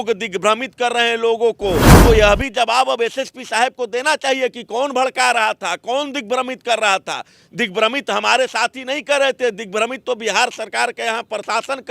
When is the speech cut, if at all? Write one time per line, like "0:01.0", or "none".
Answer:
0:01.9